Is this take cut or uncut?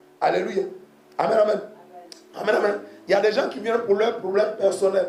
uncut